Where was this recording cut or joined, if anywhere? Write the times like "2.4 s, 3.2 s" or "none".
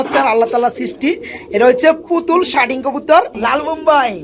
3.3 s